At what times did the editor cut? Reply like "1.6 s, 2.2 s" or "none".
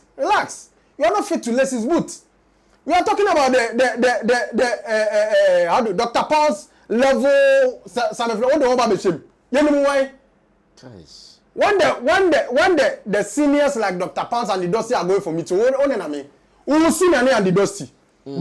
none